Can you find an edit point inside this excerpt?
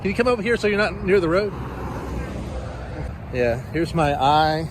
yes; 1 cut; at 3.1 s

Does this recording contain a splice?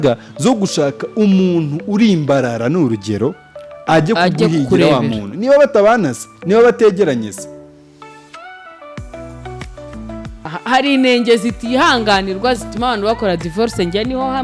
yes; 1 cut; at 10.5 s

